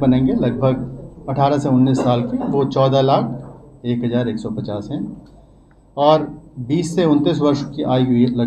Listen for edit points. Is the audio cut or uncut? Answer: uncut